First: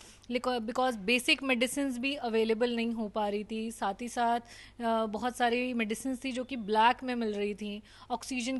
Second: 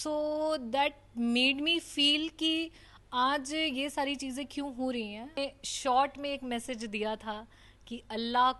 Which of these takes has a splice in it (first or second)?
second